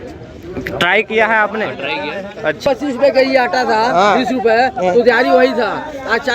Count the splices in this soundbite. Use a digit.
1